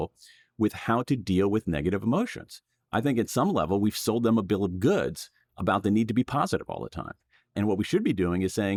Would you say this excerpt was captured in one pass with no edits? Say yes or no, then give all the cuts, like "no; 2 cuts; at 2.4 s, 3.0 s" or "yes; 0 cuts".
yes; 0 cuts